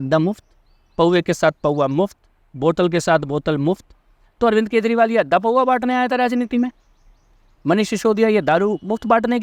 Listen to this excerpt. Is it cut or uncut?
uncut